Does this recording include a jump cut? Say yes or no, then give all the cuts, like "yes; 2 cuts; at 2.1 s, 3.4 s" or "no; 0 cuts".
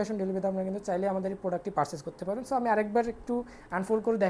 no; 0 cuts